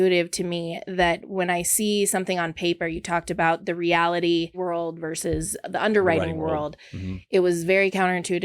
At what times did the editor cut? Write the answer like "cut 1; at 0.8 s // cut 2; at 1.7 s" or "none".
cut 1; at 4.6 s

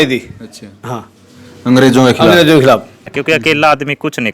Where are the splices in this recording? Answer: cut 1; at 3.2 s

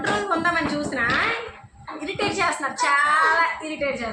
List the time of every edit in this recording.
none

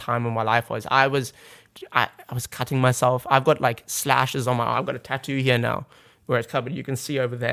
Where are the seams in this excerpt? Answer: none

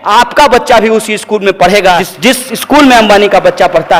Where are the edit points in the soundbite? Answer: cut 1; at 2.1 s

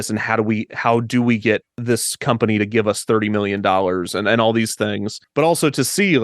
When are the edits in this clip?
cut 1; at 1.7 s // cut 2; at 5.1 s

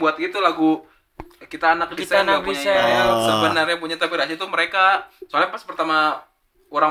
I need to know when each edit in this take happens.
none

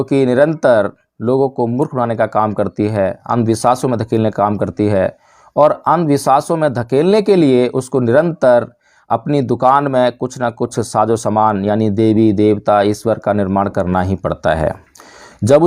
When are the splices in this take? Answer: none

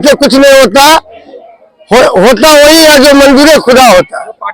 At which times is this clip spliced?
none

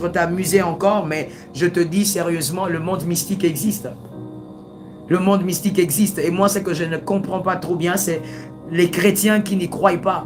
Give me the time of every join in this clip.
none

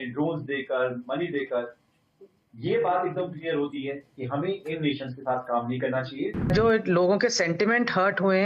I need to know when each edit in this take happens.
cut 1; at 6.5 s

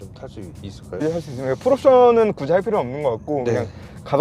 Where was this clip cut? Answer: cut 1; at 1.0 s

